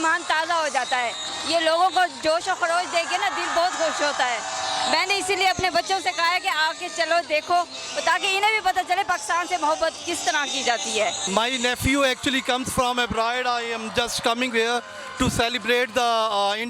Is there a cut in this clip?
no; 0 cuts

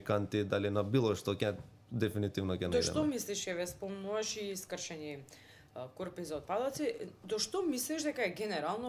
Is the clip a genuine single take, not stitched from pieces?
yes; 0 cuts

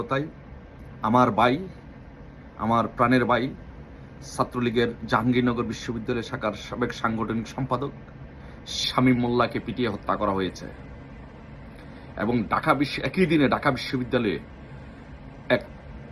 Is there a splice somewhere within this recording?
no; 0 cuts

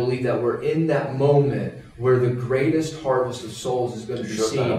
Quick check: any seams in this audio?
no; 0 cuts

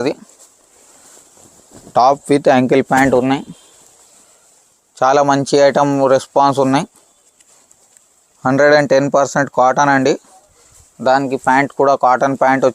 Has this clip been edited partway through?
no; 0 cuts

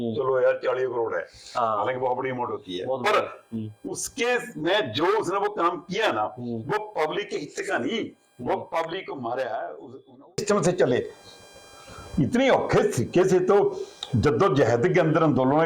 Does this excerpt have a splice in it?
yes; 1 cut; at 10.4 s

